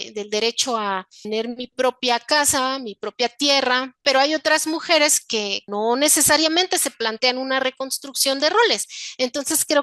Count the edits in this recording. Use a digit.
3